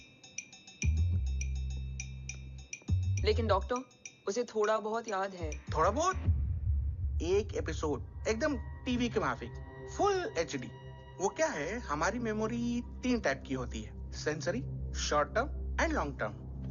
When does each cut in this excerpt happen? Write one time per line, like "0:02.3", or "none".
none